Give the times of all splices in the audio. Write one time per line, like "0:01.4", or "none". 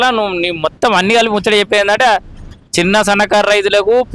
none